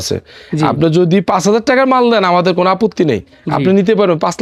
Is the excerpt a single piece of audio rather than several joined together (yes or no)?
yes